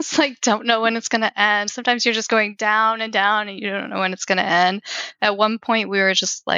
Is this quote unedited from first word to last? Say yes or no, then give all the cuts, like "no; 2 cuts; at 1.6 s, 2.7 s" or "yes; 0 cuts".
yes; 0 cuts